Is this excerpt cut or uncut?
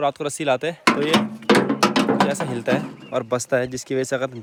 uncut